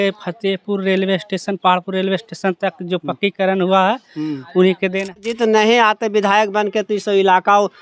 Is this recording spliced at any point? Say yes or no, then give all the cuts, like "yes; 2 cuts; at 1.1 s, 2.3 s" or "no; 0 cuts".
yes; 1 cut; at 5.2 s